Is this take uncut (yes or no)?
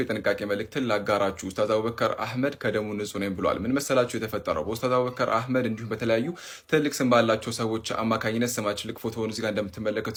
yes